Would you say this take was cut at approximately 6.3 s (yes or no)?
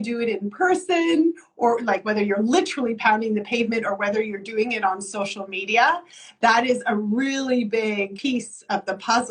no